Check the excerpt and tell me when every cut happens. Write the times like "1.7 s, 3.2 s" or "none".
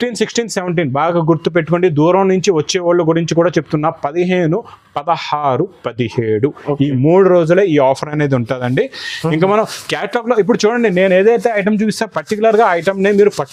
none